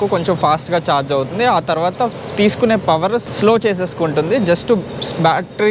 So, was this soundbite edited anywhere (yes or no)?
no